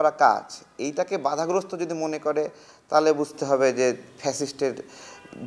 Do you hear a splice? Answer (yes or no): no